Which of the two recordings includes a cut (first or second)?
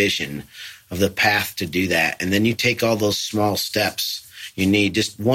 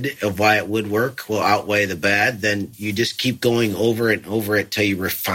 second